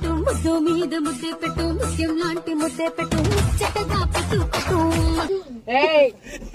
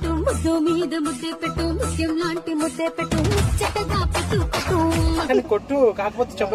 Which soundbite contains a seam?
second; 1 cut; at 5.2 s

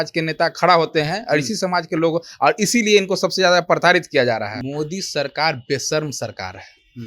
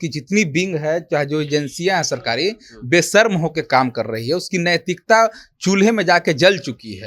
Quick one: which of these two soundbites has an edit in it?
first; 1 cut; at 4.5 s

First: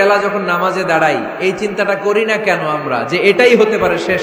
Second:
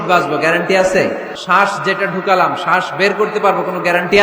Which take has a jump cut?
second; 1 cut; at 1.3 s

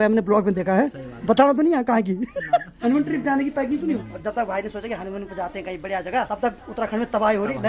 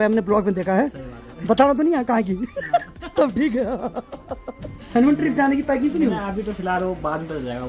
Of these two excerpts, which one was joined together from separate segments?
first; 4 cuts; at 1.1 s, 2.7 s, 4.0 s, 6.3 s

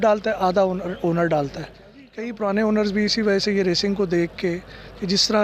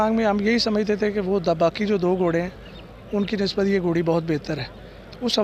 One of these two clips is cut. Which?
first; 1 cut; at 2.0 s

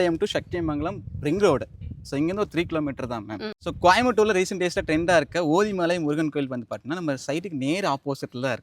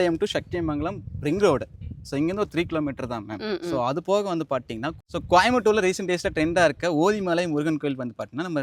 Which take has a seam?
first; 1 cut; at 3.5 s

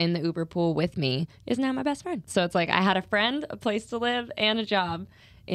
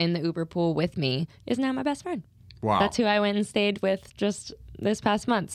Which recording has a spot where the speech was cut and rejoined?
first; 1 cut; at 2.3 s

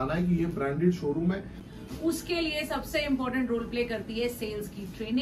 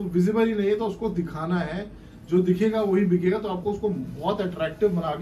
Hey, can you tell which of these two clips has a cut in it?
first; 1 cut; at 1.6 s

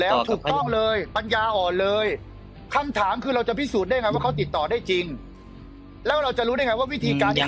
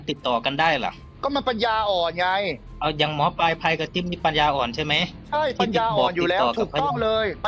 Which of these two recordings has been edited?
second; 1 cut; at 2.7 s

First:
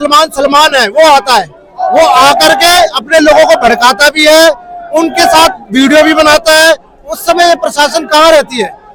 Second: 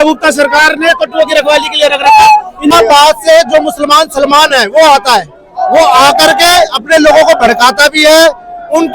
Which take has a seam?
second; 1 cut; at 2.7 s

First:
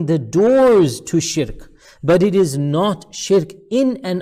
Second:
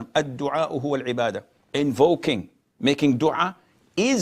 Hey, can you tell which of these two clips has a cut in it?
second; 1 cut; at 1.5 s

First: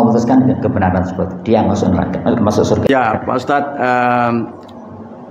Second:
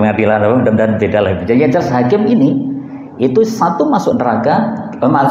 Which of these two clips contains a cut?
first; 1 cut; at 2.9 s

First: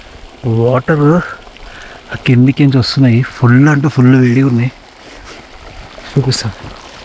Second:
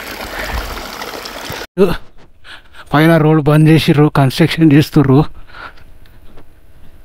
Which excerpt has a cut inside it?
second; 1 cut; at 1.5 s

